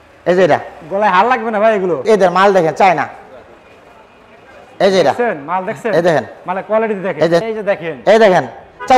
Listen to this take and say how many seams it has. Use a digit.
2